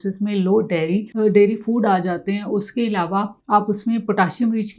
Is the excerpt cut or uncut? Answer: cut